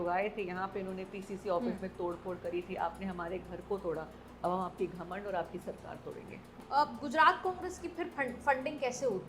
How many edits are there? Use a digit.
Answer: 1